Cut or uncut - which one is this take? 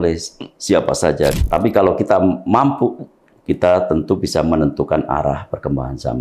cut